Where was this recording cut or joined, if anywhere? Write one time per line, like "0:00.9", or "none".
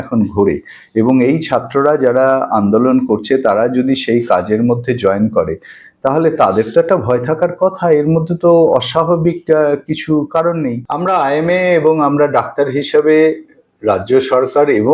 0:10.9